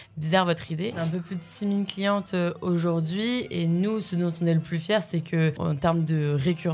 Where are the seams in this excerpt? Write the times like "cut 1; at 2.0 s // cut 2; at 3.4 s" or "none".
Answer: cut 1; at 1.0 s // cut 2; at 5.6 s